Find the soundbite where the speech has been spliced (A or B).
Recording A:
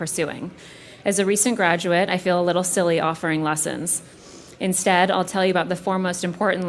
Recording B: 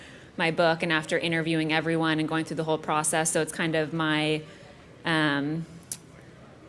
B